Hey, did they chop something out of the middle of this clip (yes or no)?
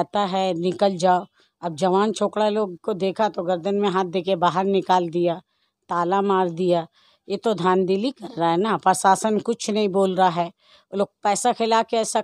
no